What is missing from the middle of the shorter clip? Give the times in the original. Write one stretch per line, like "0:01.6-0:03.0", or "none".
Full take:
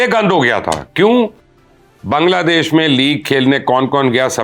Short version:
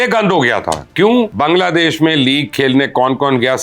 0:01.3-0:02.0